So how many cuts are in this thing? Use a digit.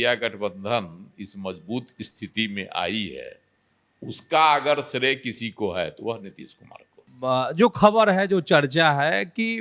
1